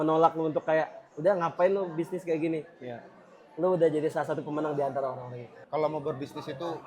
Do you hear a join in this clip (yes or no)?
yes